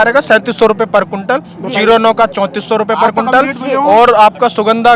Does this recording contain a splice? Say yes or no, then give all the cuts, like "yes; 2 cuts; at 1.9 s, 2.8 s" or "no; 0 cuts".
no; 0 cuts